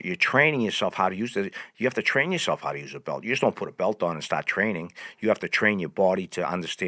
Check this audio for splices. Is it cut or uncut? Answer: uncut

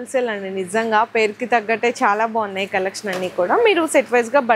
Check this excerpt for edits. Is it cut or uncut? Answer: uncut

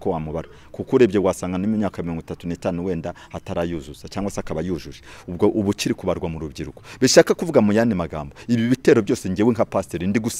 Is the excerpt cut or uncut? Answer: uncut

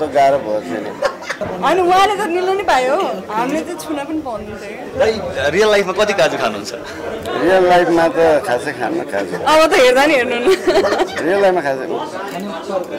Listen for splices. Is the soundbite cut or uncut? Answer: cut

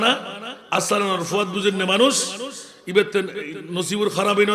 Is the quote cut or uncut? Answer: uncut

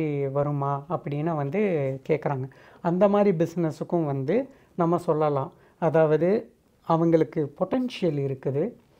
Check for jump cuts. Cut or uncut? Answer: uncut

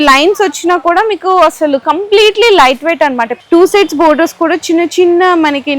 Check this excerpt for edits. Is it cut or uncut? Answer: cut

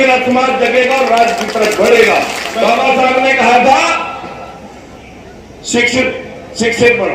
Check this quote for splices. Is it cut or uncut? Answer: cut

